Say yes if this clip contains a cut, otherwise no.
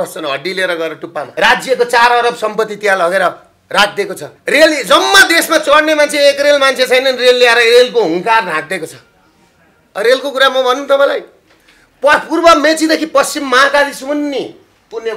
yes